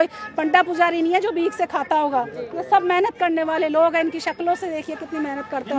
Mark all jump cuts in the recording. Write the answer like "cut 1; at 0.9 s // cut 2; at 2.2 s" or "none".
none